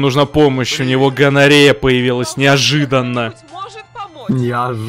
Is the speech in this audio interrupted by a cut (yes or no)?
no